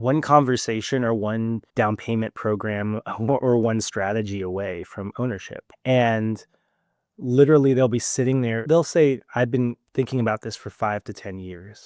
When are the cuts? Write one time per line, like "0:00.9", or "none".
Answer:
0:01.7